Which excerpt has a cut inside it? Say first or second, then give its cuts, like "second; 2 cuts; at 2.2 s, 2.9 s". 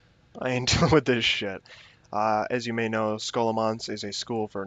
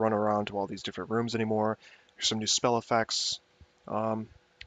second; 1 cut; at 1.1 s